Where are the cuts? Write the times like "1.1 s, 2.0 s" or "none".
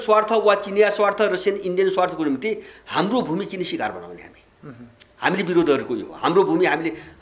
none